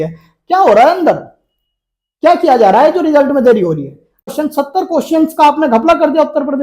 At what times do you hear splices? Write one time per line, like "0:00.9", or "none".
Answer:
0:04.3